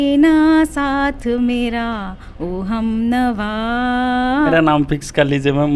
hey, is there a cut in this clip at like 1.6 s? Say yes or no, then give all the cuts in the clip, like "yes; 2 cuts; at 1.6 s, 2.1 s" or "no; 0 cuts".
no; 1 cut; at 4.5 s